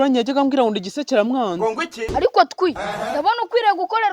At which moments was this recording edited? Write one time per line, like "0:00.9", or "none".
0:02.1